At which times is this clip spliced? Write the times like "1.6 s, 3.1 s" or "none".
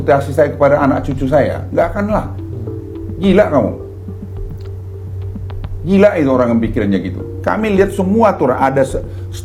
none